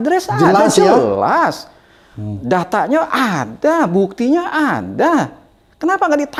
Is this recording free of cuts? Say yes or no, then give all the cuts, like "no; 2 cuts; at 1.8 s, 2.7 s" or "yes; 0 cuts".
yes; 0 cuts